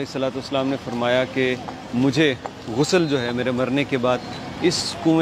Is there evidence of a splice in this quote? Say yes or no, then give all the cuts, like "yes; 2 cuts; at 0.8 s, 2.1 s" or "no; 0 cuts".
no; 0 cuts